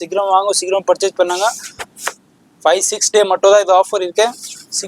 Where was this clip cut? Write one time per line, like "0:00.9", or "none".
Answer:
none